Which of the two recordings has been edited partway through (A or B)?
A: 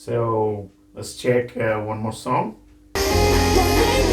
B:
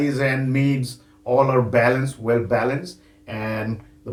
A